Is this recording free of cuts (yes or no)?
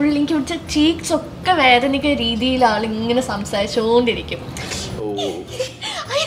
yes